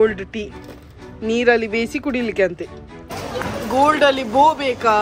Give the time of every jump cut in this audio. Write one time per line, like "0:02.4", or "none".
0:03.1